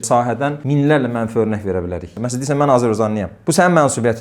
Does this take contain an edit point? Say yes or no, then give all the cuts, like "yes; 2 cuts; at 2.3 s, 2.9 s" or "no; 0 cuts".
yes; 1 cut; at 2.1 s